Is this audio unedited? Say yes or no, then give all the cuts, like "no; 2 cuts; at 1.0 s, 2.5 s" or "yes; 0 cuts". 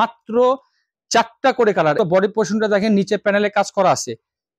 no; 1 cut; at 2.0 s